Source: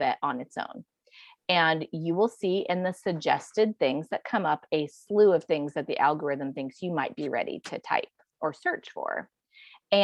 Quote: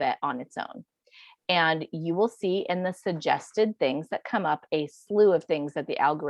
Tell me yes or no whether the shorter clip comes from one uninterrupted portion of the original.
yes